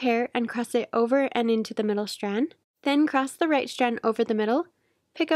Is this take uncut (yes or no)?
no